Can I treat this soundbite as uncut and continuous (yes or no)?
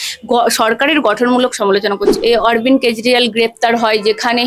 no